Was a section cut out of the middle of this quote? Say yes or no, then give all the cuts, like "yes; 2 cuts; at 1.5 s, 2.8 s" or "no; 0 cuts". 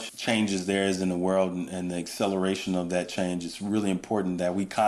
no; 0 cuts